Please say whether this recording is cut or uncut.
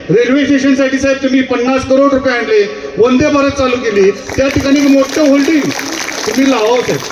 uncut